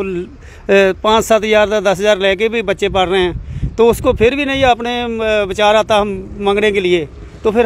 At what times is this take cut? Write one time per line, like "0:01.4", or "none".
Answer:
none